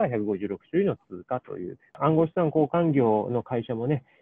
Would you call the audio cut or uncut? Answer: cut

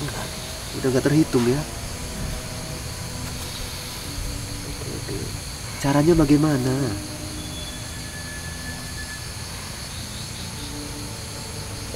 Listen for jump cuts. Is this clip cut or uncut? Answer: uncut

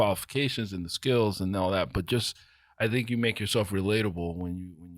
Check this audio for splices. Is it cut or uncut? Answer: uncut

